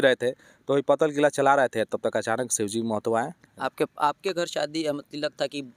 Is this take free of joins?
yes; 0 cuts

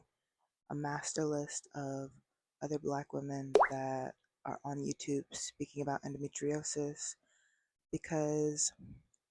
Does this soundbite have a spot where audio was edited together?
no; 0 cuts

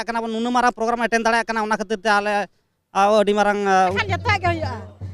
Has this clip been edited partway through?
yes; 1 cut; at 4.0 s

